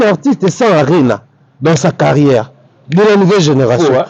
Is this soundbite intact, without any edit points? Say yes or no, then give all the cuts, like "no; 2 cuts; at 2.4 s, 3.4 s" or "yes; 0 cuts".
yes; 0 cuts